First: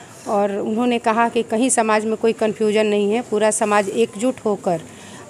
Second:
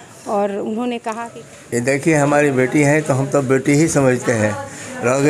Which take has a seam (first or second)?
second